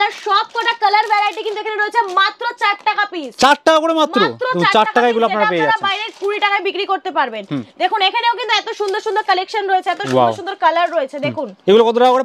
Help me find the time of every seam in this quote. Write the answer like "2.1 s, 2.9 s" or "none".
none

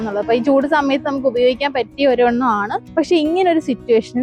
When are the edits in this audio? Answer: 2.8 s

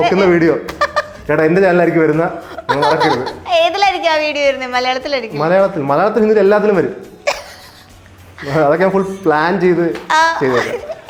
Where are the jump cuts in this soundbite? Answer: none

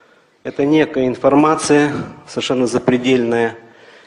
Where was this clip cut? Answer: none

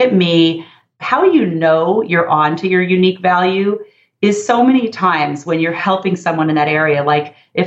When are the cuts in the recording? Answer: 0.9 s

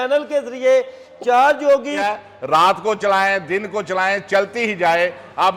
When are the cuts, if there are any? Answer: 2.0 s

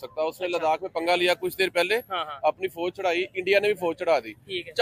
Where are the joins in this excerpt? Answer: none

